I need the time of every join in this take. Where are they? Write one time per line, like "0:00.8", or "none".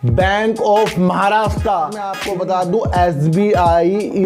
0:02.1